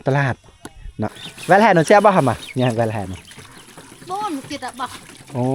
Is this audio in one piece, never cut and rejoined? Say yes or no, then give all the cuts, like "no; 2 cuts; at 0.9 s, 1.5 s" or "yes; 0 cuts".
no; 1 cut; at 1.2 s